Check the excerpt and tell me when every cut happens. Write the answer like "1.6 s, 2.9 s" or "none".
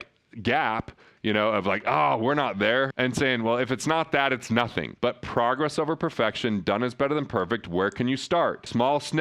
2.9 s